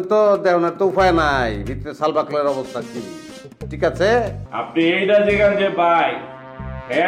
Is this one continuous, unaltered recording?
no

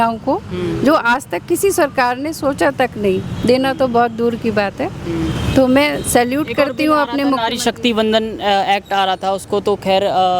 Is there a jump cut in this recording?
no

